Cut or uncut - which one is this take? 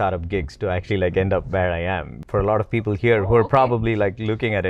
cut